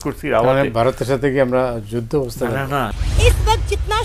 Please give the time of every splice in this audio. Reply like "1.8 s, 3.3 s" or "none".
2.9 s